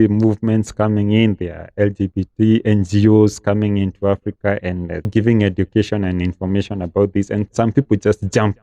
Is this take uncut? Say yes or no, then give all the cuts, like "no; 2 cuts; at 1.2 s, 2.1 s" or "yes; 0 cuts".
no; 1 cut; at 5.1 s